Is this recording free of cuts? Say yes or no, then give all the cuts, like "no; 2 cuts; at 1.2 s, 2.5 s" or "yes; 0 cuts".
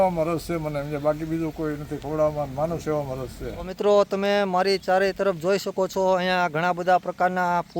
no; 1 cut; at 3.6 s